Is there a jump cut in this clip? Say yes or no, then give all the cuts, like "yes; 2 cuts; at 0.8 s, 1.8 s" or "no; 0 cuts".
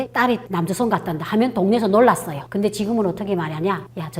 yes; 1 cut; at 2.4 s